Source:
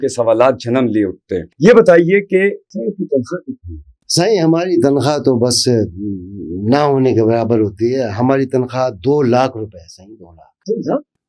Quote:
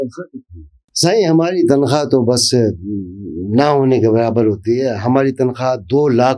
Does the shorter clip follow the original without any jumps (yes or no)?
yes